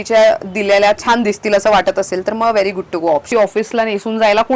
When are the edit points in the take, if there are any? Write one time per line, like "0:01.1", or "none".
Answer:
0:03.3